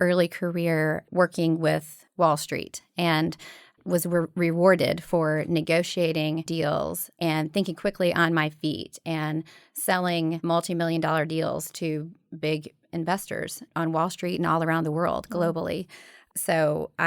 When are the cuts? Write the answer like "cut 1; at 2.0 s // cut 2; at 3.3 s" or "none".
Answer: cut 1; at 7.0 s // cut 2; at 10.4 s // cut 3; at 13.7 s